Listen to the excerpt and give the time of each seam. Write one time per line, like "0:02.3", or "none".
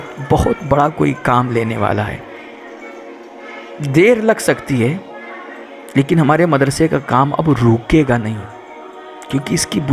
none